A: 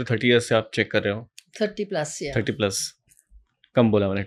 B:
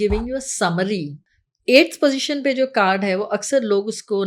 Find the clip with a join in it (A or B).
B